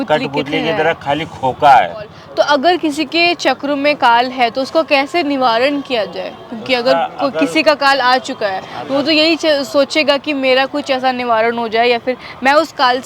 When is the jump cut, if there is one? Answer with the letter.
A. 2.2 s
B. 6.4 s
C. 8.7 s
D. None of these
A